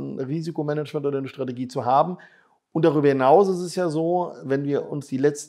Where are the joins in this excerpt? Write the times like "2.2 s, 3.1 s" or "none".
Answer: none

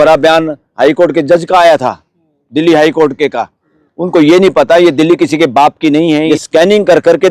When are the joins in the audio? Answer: 6.3 s

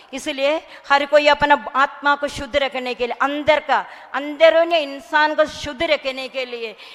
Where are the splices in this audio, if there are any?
none

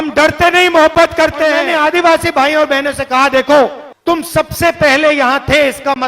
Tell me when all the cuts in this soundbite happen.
1.6 s, 3.9 s

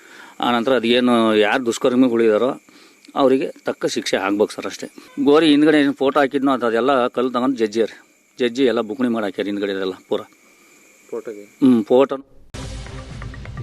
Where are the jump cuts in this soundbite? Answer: 12.7 s

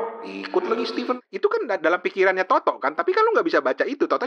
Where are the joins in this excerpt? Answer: 1.2 s

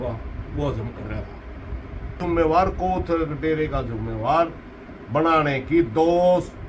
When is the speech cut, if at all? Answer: 2.2 s

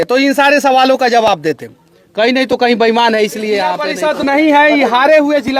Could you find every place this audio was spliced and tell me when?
3.9 s

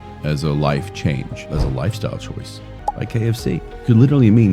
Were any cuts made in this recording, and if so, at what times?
2.7 s

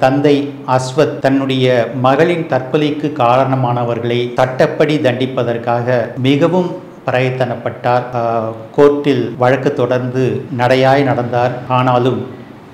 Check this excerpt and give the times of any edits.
1.1 s, 4.3 s, 6.1 s, 8.1 s, 9.3 s, 10.5 s, 11.6 s

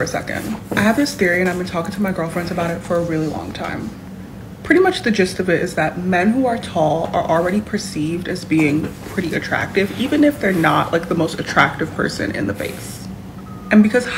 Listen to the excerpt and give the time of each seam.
none

